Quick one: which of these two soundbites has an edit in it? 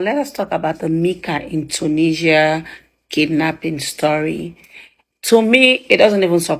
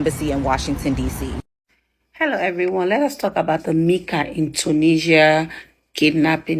second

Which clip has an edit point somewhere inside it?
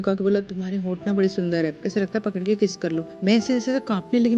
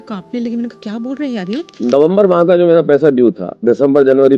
second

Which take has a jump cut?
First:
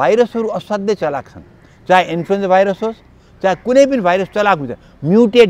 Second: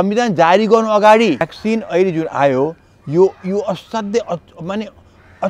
second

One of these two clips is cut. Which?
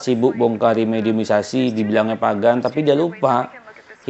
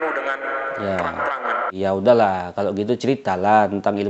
second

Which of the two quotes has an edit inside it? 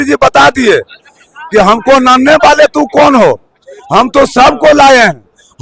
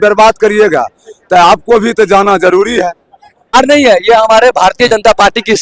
second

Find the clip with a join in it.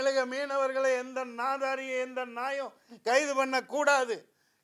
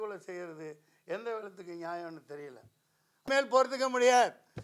second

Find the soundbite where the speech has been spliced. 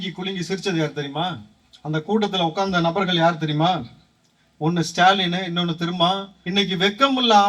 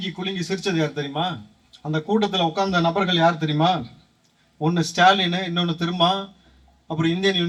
first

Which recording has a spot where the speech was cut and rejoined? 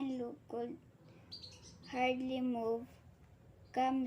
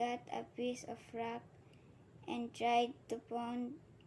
first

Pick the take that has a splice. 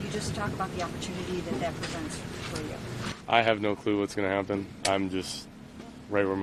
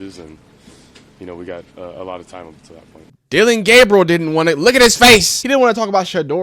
second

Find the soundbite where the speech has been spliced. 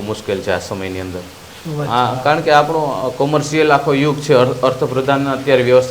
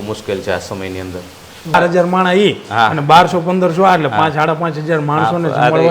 second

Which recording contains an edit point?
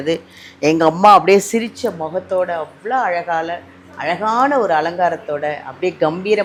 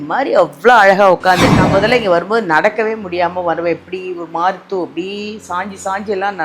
second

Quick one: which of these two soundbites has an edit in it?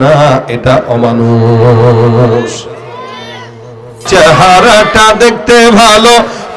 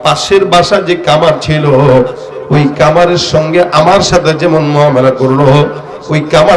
first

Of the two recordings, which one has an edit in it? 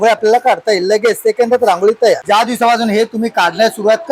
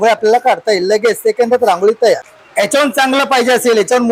first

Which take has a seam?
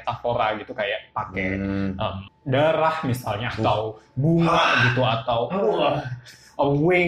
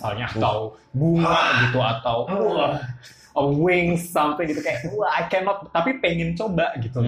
first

